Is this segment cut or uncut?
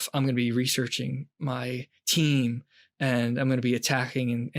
uncut